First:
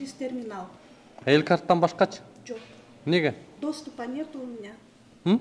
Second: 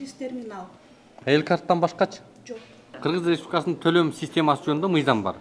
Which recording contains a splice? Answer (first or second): second